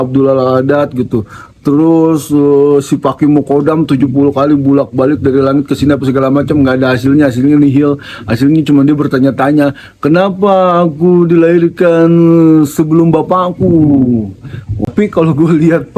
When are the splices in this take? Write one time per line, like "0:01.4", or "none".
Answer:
0:14.9

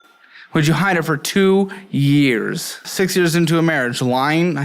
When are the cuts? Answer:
0:02.8

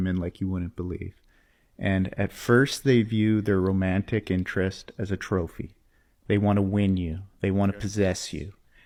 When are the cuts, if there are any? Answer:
none

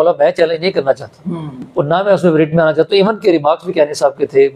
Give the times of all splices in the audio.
none

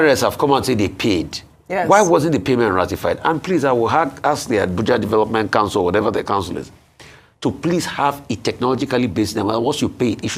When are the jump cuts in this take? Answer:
none

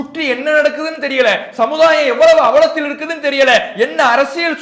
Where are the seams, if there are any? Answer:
none

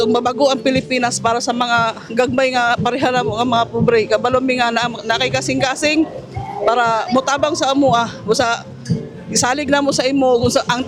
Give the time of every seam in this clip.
none

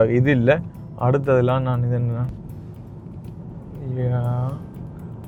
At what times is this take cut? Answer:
none

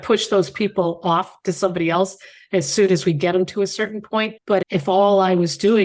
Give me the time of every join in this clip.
none

